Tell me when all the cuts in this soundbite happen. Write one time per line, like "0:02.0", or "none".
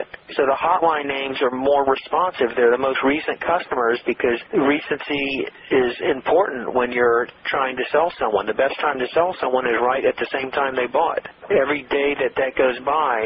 none